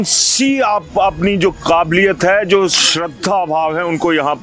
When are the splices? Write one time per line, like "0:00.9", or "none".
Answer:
none